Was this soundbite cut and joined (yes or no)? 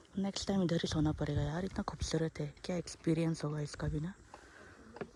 no